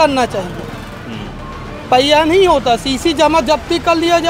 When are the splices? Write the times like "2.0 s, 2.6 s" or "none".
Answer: none